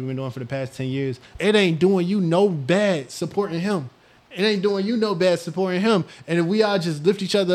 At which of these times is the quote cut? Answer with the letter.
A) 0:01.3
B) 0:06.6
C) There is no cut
A